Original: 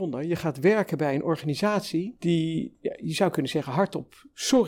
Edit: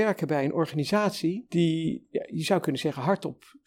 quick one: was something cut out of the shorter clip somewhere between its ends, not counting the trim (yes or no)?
no